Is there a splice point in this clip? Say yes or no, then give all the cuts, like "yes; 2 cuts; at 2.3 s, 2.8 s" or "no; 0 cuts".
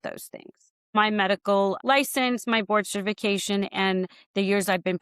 yes; 1 cut; at 0.9 s